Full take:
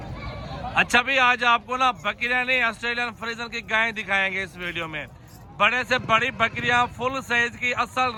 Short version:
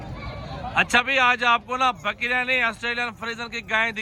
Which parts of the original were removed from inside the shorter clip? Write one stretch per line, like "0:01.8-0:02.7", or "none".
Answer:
none